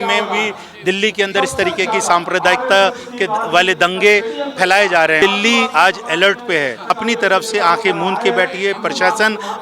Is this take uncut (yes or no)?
no